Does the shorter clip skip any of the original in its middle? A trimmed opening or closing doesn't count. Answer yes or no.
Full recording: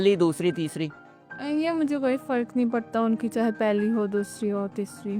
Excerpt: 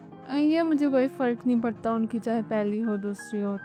no